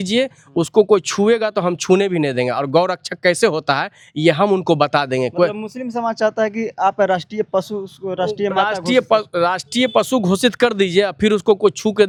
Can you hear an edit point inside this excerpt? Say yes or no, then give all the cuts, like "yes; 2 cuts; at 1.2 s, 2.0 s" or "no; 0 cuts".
no; 0 cuts